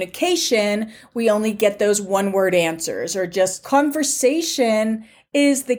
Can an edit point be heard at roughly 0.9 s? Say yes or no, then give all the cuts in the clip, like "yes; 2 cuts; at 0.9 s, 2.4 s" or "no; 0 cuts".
no; 1 cut; at 3.6 s